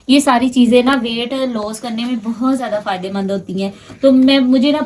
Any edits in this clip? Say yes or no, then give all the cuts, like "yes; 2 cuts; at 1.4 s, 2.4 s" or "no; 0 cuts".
no; 0 cuts